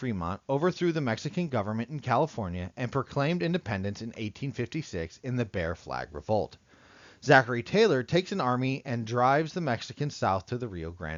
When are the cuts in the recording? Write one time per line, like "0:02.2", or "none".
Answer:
none